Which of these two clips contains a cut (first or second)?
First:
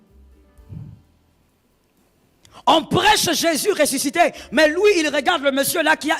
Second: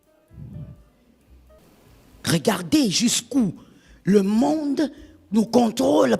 second